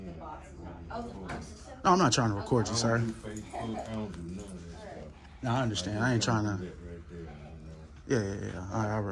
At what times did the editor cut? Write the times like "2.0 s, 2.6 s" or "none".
none